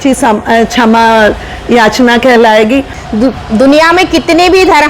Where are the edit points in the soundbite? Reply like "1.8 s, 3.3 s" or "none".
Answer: 3.0 s